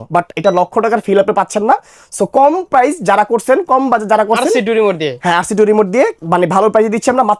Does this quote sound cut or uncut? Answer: uncut